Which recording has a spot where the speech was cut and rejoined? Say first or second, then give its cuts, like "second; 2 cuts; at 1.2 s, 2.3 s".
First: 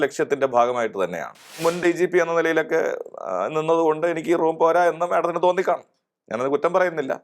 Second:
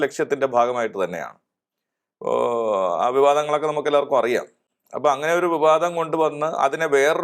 first; 1 cut; at 1.6 s